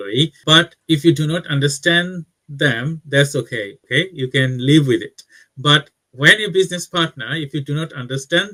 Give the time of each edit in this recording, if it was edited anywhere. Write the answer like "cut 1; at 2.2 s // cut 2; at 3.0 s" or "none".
none

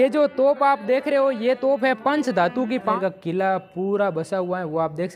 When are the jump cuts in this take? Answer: cut 1; at 2.9 s

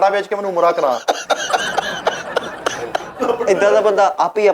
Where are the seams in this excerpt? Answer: cut 1; at 3.5 s

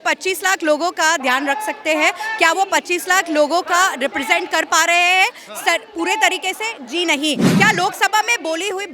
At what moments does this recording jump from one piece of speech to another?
cut 1; at 7.5 s

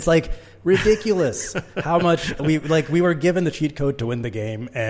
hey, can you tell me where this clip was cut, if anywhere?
none

